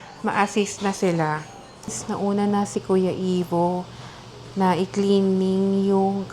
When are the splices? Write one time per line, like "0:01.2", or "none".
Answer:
0:02.1